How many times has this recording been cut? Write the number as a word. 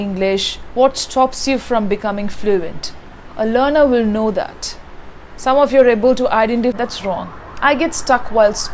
one